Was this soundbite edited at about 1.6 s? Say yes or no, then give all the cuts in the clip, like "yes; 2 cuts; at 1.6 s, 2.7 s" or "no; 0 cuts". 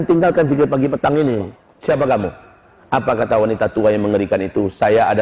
yes; 1 cut; at 1.6 s